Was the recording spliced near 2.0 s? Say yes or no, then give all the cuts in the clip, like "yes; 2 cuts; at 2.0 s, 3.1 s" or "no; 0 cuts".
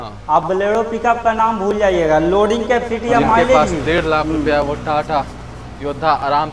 no; 1 cut; at 3.6 s